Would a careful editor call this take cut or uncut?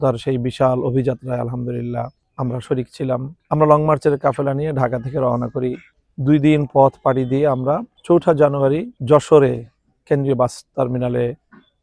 cut